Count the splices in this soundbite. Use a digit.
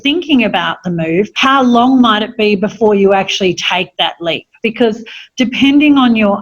2